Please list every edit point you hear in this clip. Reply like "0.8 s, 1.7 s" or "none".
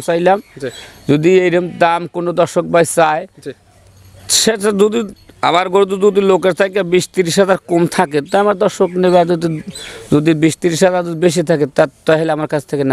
none